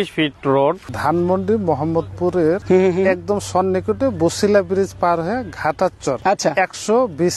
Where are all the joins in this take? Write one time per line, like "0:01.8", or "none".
0:00.9
0:02.6
0:06.2